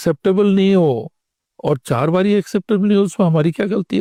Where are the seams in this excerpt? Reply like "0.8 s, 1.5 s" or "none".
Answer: none

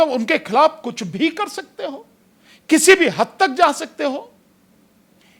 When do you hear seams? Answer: none

